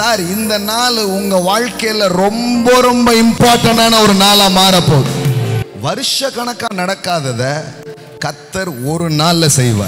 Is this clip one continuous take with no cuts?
no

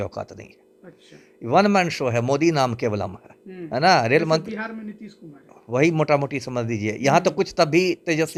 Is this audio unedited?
yes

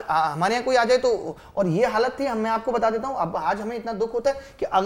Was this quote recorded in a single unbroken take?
yes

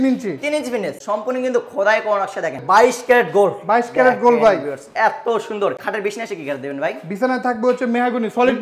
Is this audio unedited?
no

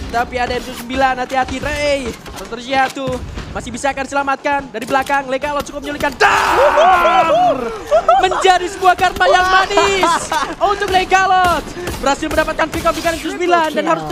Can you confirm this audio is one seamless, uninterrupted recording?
yes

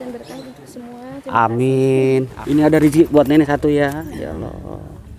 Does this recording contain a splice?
yes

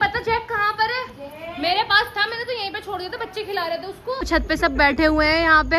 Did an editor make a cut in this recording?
yes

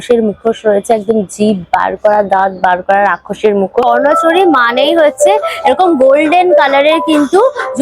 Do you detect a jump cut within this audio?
yes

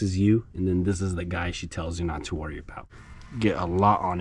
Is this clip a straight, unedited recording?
no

